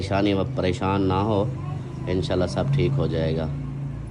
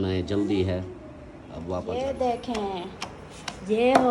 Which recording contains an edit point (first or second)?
second